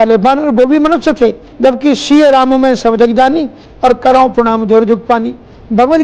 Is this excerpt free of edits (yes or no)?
no